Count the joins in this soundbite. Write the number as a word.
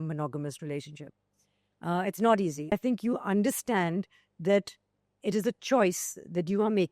one